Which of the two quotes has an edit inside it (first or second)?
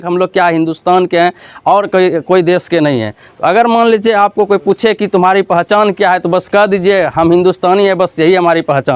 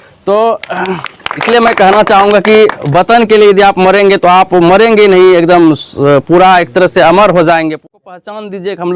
second